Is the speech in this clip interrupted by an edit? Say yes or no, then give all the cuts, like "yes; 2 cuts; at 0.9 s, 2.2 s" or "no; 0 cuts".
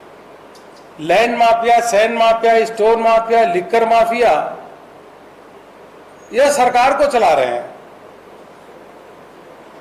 no; 0 cuts